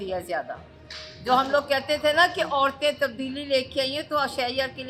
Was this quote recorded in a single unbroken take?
yes; 0 cuts

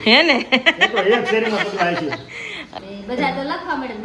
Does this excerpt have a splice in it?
yes; 1 cut; at 2.7 s

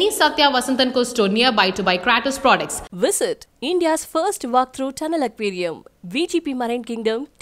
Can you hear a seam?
no; 0 cuts

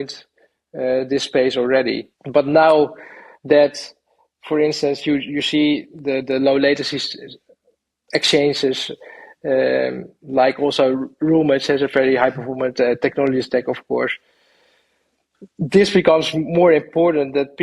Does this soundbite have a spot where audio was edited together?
yes; 1 cut; at 2.1 s

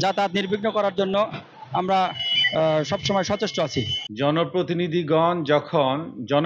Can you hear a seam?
yes; 1 cut; at 4.0 s

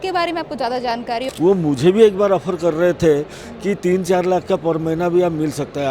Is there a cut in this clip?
yes; 1 cut; at 1.3 s

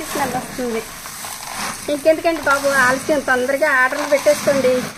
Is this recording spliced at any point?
yes; 1 cut; at 1.5 s

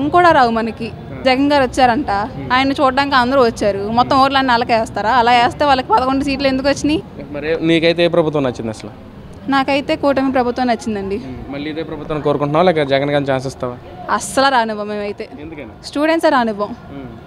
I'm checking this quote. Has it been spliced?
yes; 2 cuts; at 1.2 s, 7.2 s

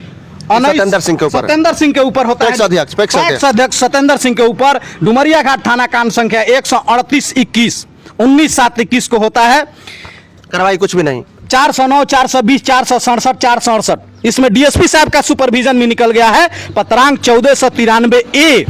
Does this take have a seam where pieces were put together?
no; 0 cuts

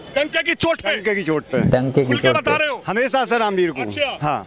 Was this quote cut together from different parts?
no; 0 cuts

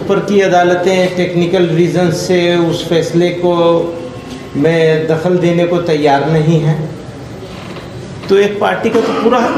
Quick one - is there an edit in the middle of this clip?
no; 0 cuts

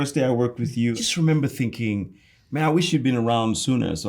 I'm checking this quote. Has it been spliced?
yes; 1 cut; at 1.0 s

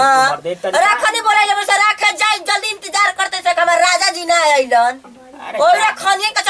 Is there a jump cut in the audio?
no; 0 cuts

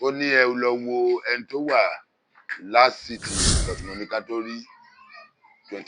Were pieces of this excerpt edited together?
yes; 1 cut; at 3.5 s

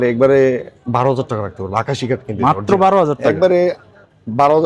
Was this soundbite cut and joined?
no; 0 cuts

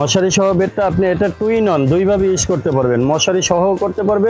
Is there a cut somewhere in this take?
no; 0 cuts

